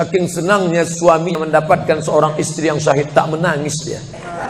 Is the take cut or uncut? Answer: cut